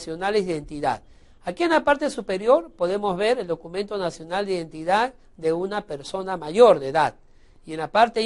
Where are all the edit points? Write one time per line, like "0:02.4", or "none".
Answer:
0:06.3